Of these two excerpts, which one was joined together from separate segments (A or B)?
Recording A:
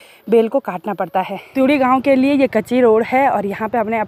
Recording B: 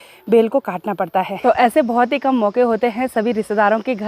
B